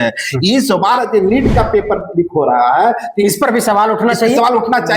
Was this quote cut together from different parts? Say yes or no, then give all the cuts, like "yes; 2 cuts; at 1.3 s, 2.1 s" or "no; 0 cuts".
no; 0 cuts